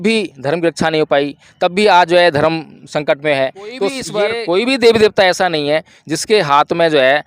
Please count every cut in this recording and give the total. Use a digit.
1